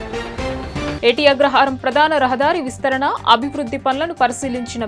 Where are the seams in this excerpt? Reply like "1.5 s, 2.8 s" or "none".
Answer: 1.0 s